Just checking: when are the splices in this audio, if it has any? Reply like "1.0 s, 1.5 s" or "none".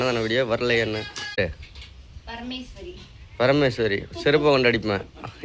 1.4 s